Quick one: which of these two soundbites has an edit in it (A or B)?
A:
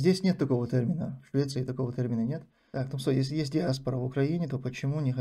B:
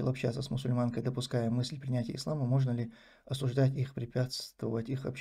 A